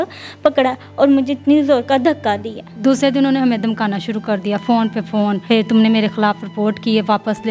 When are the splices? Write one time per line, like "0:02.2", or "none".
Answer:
0:02.7
0:05.4

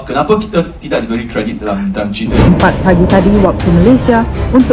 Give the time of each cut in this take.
0:02.7

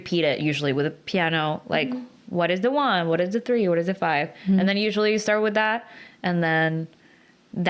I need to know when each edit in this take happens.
none

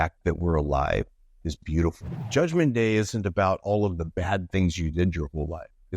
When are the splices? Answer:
0:02.2

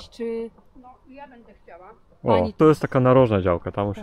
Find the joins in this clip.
0:02.6

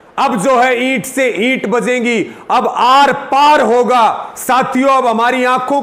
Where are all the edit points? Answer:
0:04.3

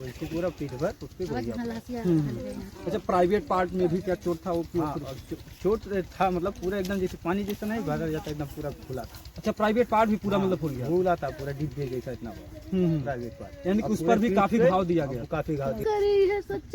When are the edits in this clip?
0:15.8

